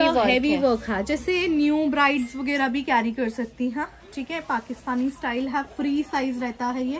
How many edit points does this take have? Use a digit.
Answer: 0